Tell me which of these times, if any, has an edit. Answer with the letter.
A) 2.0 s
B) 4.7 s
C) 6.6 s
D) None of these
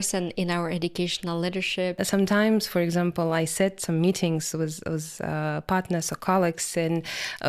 A